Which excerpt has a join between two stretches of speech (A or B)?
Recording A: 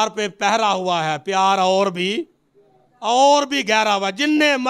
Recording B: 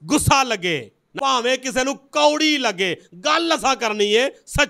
B